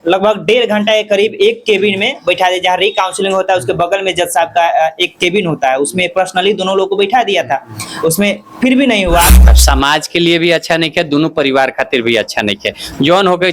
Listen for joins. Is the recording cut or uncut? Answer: cut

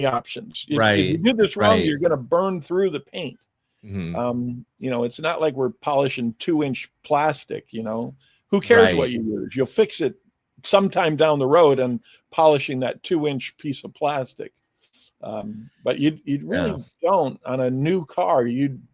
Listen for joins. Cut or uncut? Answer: uncut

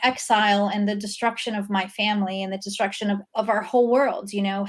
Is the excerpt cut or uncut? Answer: cut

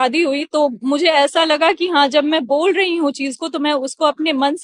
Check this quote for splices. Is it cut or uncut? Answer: uncut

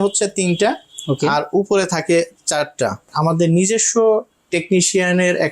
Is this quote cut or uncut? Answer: cut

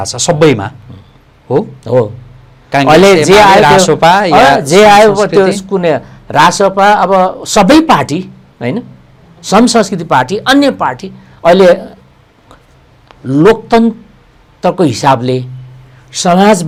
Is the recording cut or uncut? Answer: uncut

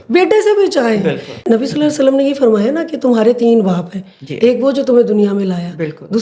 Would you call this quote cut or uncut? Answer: cut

